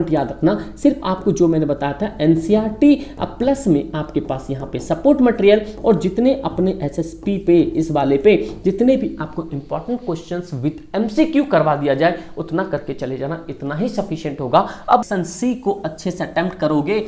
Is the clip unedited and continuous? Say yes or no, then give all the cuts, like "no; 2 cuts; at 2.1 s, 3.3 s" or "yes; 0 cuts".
no; 1 cut; at 15.0 s